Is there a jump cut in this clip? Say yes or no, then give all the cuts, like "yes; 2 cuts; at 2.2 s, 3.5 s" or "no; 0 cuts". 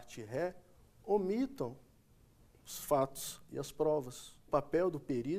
yes; 1 cut; at 4.5 s